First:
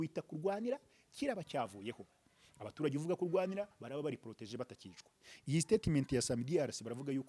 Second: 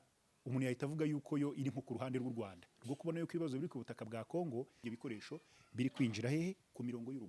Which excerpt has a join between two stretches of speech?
second; 1 cut; at 4.8 s

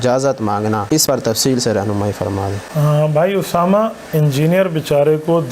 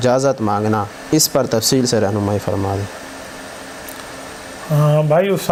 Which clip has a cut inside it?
first; 2 cuts; at 1.0 s, 2.6 s

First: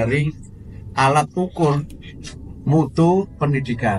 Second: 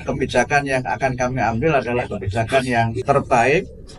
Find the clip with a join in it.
second; 1 cut; at 3.0 s

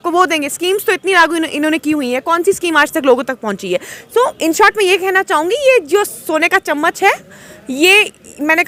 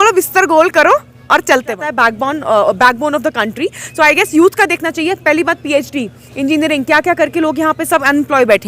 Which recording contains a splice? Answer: second; 1 cut; at 1.9 s

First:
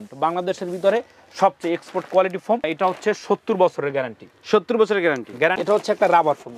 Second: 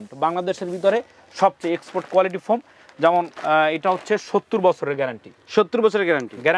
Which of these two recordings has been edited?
first; 2 cuts; at 2.7 s, 5.6 s

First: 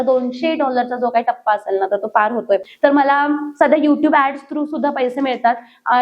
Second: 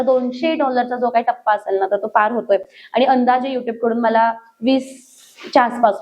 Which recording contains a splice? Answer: first; 1 cut; at 2.7 s

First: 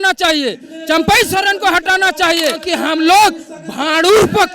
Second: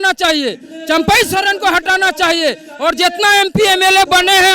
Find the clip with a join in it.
first; 1 cut; at 2.6 s

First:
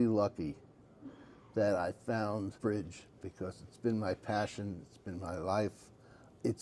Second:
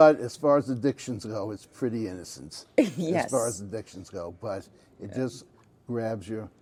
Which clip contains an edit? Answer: first; 1 cut; at 2.6 s

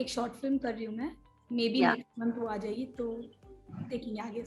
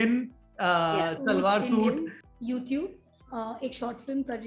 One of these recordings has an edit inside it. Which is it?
second; 1 cut; at 2.2 s

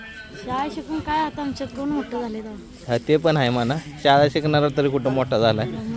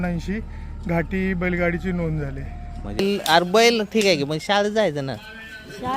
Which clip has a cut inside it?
second; 1 cut; at 3.0 s

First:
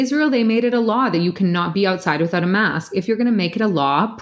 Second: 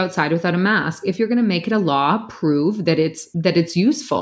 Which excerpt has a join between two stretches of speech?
second; 1 cut; at 3.2 s

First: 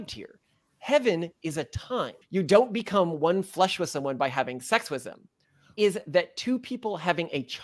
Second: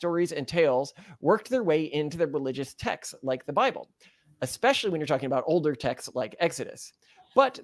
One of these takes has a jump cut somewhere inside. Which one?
first; 2 cuts; at 2.2 s, 5.7 s

